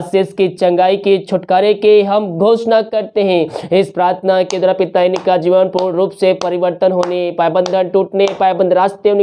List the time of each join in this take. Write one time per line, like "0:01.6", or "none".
none